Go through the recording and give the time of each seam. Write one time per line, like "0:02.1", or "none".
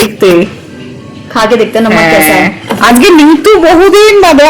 none